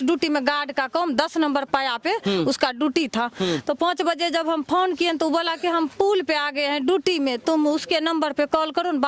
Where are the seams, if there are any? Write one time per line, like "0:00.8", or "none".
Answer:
none